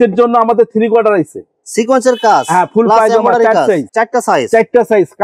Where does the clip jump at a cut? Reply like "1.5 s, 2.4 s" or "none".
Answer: none